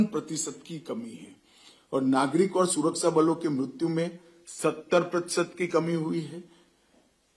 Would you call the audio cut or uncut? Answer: uncut